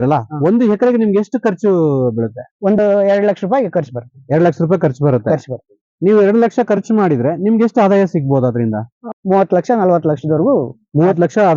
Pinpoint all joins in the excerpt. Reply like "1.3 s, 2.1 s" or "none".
2.8 s, 9.0 s

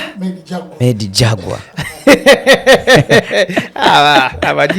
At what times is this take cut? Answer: none

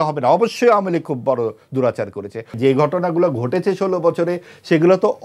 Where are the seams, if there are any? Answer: 2.5 s

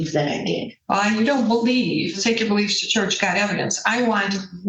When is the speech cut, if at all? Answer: 2.2 s

